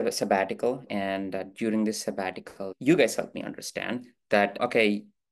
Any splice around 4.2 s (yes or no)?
no